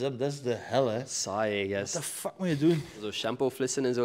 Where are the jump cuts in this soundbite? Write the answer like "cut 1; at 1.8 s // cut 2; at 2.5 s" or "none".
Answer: cut 1; at 3.0 s